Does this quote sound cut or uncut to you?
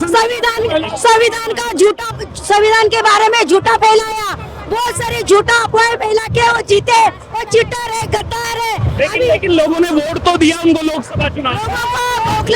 uncut